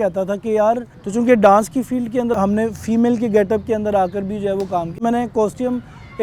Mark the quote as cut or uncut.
cut